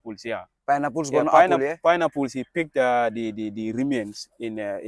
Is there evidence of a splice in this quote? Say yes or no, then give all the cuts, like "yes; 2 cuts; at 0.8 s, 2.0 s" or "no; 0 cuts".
no; 0 cuts